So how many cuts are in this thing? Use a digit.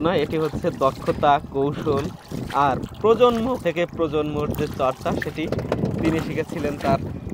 1